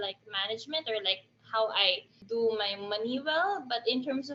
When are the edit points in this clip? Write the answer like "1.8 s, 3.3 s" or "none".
none